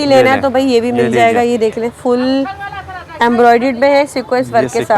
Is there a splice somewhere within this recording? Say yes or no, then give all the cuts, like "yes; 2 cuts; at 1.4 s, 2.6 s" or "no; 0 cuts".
no; 0 cuts